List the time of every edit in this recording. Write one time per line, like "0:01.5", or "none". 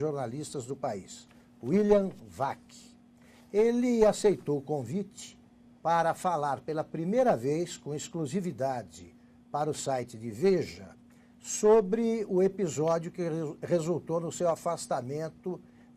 0:06.2